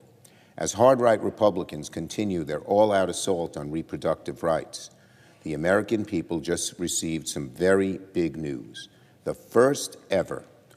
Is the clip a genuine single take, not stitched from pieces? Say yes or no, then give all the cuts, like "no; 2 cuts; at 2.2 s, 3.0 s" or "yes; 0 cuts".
no; 2 cuts; at 2.0 s, 7.1 s